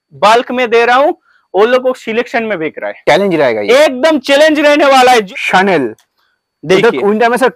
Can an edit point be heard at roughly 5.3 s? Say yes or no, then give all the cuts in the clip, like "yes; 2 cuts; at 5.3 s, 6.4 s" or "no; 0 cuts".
yes; 2 cuts; at 2.9 s, 5.3 s